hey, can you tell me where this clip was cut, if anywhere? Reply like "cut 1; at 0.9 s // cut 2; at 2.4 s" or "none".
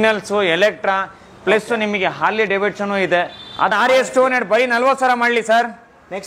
cut 1; at 3.7 s